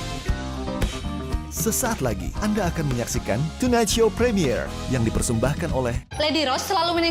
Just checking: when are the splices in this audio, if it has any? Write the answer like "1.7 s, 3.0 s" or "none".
none

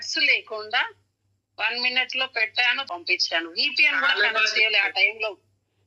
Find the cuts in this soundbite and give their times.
2.8 s

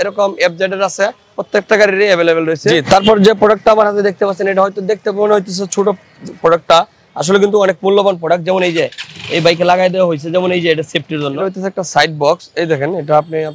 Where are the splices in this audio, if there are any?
1.3 s, 2.7 s, 11.4 s

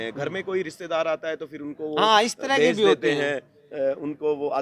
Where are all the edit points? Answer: none

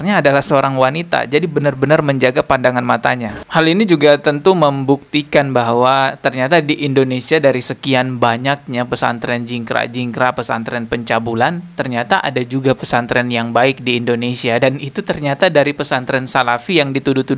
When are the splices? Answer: 3.4 s

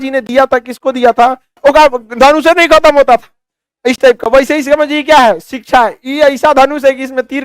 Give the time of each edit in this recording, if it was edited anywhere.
1.5 s

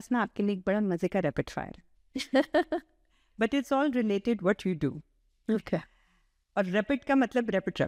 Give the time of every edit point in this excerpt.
none

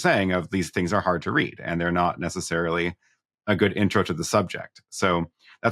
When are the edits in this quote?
none

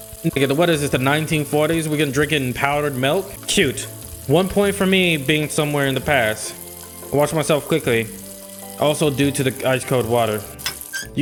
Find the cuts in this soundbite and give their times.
none

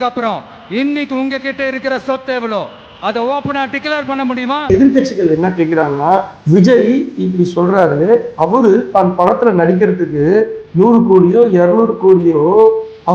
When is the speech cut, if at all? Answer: 4.7 s

